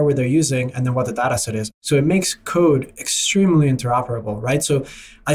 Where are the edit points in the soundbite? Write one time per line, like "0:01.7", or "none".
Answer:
0:01.8

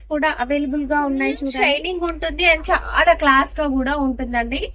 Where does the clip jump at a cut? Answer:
0:01.7

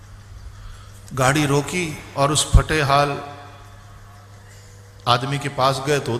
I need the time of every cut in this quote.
none

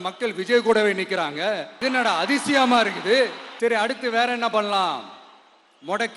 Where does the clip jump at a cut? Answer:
0:01.7
0:03.4

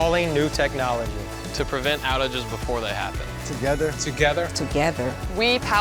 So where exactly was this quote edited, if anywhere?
none

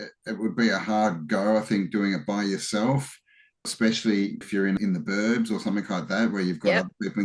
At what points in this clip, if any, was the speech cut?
0:03.7
0:04.7

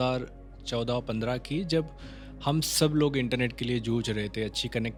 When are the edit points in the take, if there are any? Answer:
none

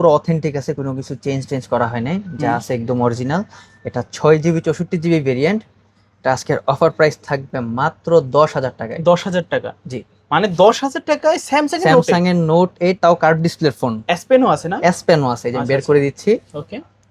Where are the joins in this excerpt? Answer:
none

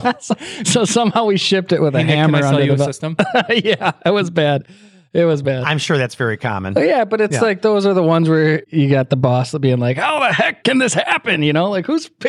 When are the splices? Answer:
none

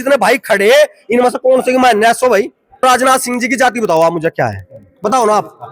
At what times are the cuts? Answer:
0:02.8

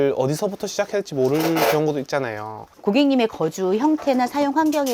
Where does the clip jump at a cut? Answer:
none

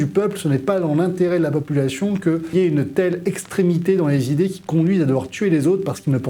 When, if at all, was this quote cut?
0:02.5

